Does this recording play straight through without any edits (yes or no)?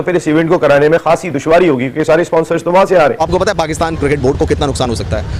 yes